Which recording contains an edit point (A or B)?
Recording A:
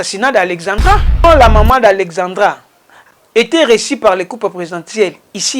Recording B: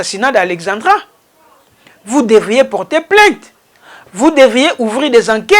A